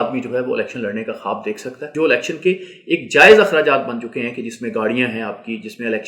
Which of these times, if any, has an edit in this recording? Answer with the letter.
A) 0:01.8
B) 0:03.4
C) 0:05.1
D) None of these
A